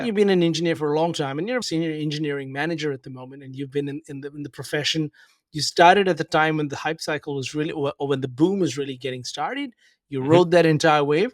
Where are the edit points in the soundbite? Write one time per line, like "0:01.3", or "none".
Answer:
0:01.6